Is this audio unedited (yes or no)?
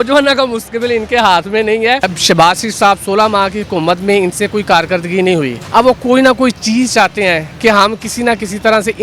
no